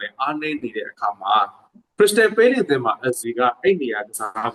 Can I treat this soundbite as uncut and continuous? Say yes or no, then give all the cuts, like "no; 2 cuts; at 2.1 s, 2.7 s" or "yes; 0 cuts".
yes; 0 cuts